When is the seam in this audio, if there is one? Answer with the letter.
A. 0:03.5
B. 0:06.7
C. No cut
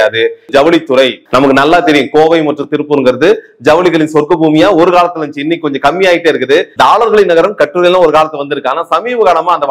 B